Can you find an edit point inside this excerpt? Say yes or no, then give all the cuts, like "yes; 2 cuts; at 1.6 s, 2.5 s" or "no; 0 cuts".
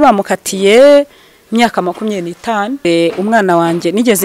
yes; 1 cut; at 2.8 s